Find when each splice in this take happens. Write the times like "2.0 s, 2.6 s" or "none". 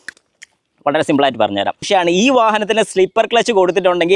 1.8 s